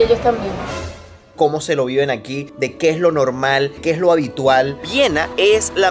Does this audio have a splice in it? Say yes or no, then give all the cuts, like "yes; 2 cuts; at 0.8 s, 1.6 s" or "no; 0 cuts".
yes; 2 cuts; at 0.7 s, 4.8 s